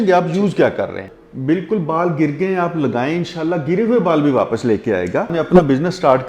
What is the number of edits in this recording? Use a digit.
2